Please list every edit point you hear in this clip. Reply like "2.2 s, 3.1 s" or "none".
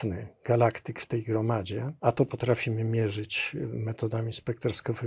1.9 s